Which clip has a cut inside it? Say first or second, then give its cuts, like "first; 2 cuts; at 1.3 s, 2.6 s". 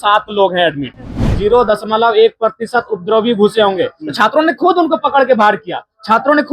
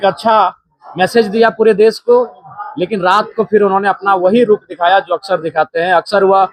first; 1 cut; at 1.1 s